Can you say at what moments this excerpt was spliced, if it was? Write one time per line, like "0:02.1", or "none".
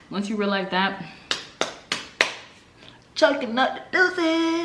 none